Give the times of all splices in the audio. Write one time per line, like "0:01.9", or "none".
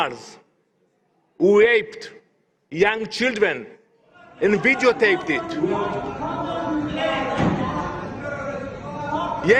none